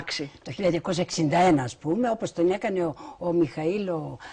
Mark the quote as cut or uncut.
cut